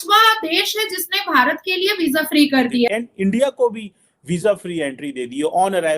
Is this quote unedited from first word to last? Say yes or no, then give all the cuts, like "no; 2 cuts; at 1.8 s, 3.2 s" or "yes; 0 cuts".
no; 1 cut; at 2.9 s